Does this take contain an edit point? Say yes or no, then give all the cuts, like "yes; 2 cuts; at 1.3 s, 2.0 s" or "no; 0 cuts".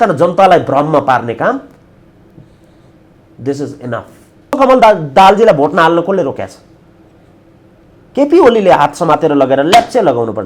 yes; 1 cut; at 4.5 s